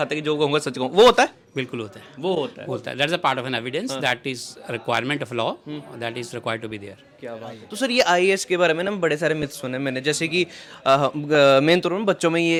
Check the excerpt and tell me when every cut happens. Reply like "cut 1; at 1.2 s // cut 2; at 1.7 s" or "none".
none